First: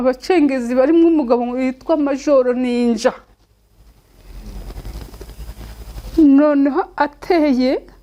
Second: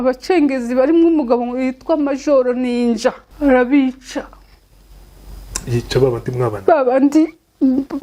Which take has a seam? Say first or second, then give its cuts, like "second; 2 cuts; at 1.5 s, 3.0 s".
second; 1 cut; at 3.3 s